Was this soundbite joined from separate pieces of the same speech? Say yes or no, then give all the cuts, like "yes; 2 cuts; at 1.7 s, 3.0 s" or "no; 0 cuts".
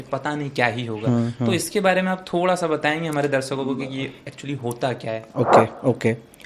no; 0 cuts